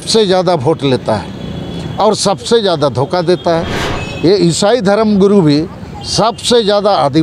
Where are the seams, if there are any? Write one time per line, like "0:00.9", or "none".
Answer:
0:03.8

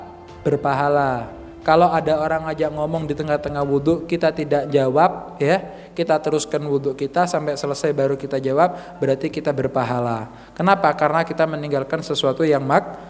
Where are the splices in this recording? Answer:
none

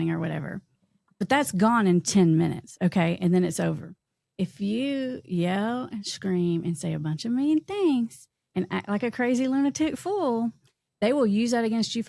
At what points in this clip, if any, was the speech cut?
none

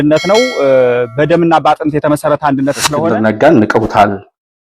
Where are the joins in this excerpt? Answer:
0:03.0

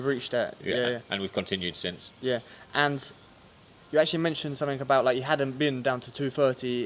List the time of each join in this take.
none

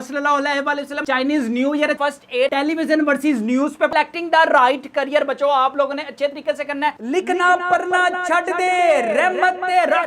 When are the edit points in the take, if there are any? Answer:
0:01.0
0:02.4
0:03.9
0:07.0

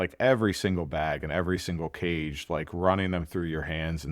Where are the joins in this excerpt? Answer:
none

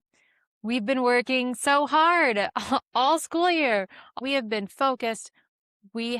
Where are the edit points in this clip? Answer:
0:04.2

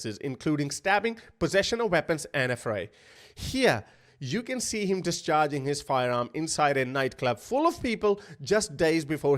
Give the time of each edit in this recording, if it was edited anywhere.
0:03.1

